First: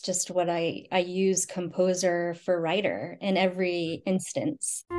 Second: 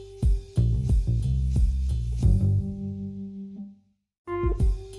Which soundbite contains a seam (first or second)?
second